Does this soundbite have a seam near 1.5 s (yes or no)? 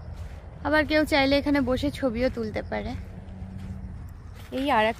no